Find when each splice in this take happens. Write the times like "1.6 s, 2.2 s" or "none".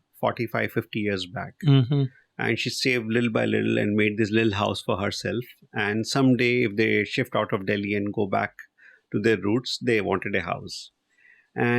none